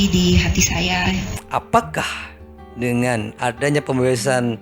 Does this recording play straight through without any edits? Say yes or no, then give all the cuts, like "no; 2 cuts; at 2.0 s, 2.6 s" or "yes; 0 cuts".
no; 1 cut; at 1.4 s